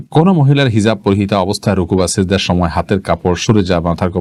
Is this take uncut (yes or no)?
yes